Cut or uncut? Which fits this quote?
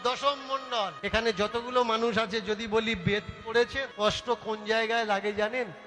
cut